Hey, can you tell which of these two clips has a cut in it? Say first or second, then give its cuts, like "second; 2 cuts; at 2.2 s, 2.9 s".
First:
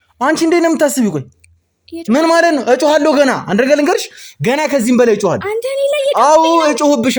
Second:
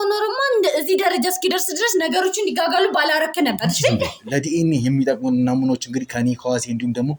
second; 1 cut; at 4.2 s